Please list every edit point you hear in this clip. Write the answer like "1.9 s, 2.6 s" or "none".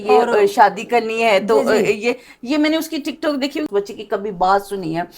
3.7 s